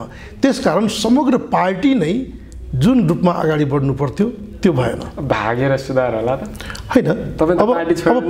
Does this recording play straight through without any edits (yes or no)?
yes